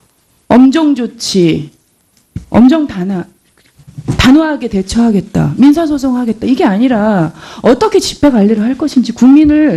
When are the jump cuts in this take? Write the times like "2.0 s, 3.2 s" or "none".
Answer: none